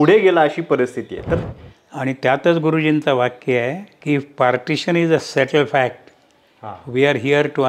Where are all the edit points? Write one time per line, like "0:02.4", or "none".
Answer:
0:01.4
0:03.9